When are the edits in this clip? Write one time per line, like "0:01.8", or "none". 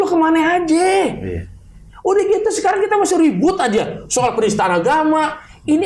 none

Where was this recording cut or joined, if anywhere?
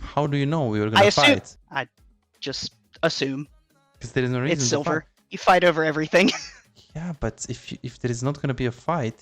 0:01.6

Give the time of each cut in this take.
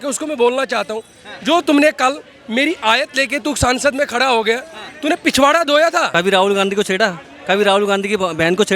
0:06.1

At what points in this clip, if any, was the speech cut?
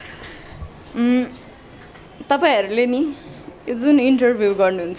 none

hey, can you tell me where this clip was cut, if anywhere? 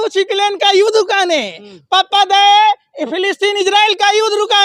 none

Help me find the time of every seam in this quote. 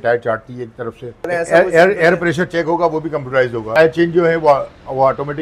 0:01.3
0:03.7

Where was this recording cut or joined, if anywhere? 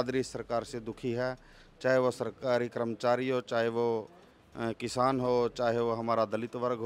none

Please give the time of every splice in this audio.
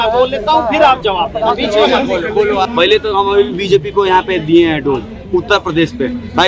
0:02.7

